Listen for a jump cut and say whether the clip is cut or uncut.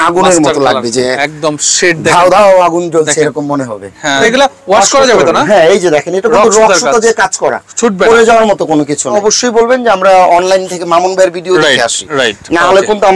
cut